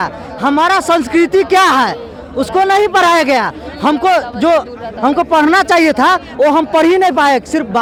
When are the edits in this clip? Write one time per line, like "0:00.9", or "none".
none